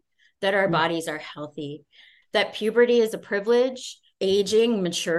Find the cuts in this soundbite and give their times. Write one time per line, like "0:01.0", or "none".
0:02.3

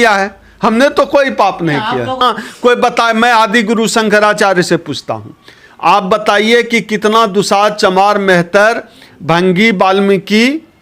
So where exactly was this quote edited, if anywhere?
0:02.2

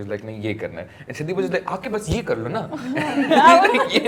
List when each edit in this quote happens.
none

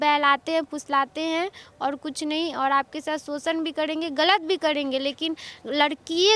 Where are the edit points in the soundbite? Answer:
none

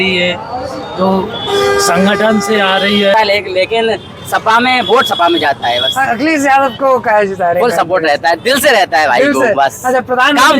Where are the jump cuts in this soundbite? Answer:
0:03.1

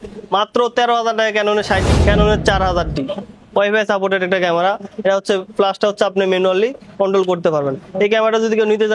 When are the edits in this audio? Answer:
0:01.8

